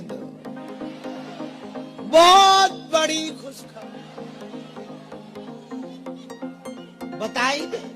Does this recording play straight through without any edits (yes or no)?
no